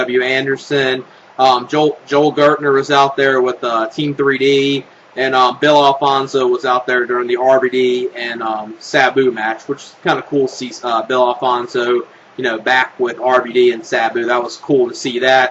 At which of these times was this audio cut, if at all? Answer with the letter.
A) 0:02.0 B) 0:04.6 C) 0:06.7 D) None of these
B